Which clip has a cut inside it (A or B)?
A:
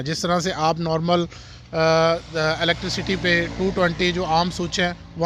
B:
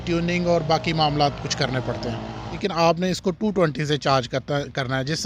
B